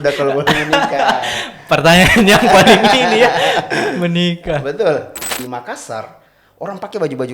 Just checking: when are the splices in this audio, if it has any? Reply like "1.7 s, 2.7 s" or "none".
5.2 s

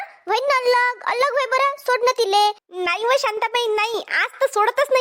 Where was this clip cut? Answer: 2.7 s

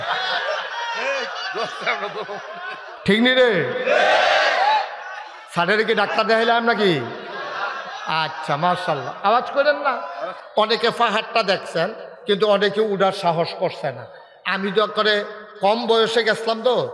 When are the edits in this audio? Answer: 10.3 s

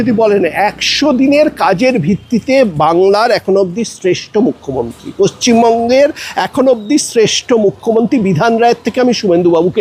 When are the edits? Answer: none

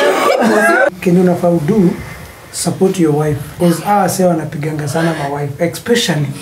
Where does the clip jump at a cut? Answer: 0.9 s, 3.5 s

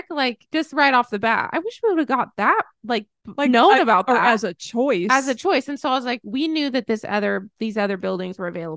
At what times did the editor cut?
3.2 s

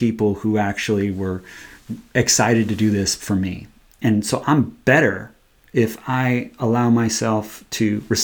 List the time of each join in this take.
4.0 s

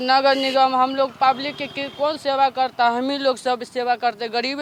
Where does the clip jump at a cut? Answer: none

